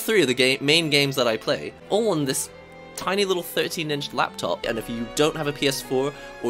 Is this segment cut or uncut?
cut